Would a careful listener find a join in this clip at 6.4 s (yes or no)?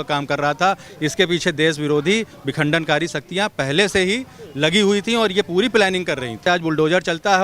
yes